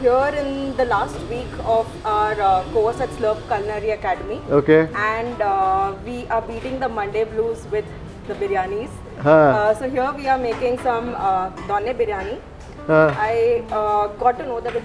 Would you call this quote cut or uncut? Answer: uncut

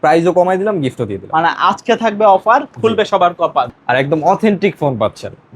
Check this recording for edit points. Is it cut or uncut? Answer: cut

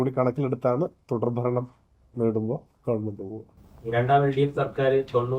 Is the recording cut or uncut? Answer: uncut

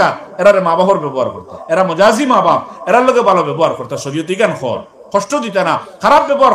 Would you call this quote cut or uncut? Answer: cut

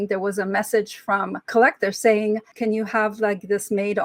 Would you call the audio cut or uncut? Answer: cut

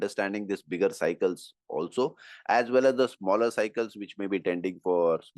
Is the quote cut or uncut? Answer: uncut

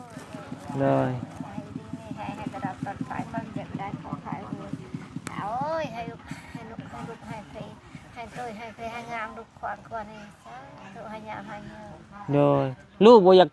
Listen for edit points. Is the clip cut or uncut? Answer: uncut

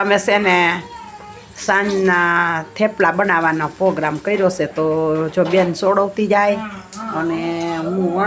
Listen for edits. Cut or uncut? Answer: uncut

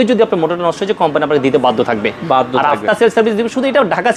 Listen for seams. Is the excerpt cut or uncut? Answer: uncut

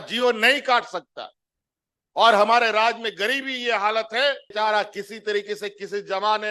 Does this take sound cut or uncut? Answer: uncut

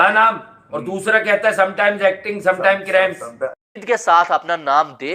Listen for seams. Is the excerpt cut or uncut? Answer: cut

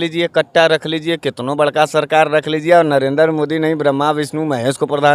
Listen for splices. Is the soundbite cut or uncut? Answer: uncut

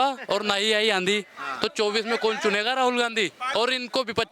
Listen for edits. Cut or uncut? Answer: cut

